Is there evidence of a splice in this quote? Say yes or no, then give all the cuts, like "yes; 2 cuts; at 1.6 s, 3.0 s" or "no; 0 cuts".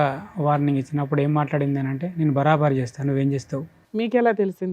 yes; 1 cut; at 3.8 s